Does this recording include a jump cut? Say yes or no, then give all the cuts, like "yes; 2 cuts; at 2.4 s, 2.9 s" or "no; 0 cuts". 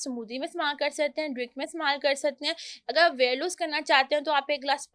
no; 0 cuts